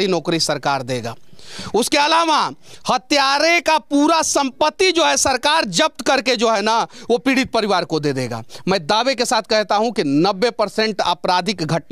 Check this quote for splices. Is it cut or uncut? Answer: uncut